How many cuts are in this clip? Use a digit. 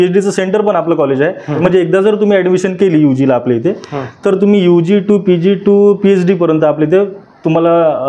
1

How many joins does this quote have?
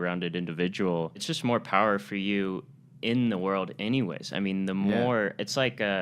1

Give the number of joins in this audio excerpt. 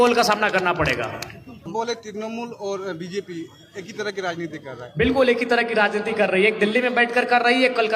1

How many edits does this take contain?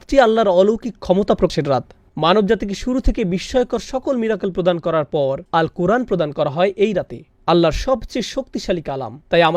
1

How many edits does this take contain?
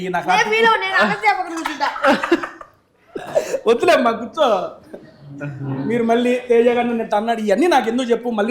0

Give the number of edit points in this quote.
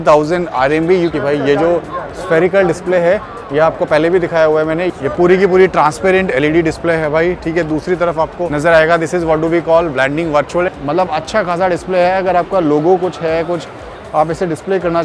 4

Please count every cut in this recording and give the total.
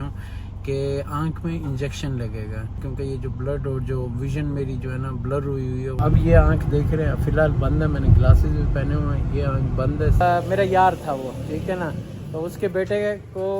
3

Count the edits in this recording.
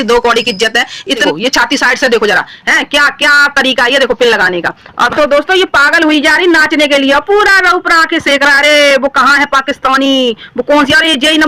2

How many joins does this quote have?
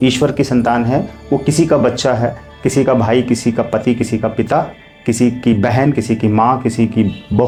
0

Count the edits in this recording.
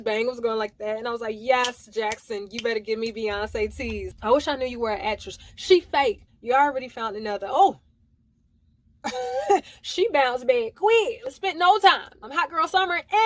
4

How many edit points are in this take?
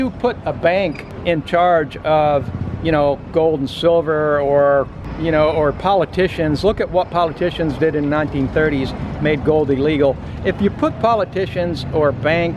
1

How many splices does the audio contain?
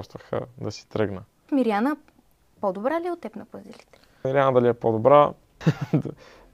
3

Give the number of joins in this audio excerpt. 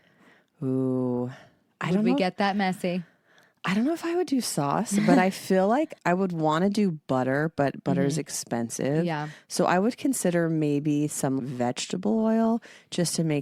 0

